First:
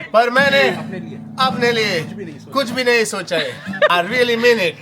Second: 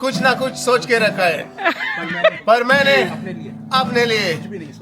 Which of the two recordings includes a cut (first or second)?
first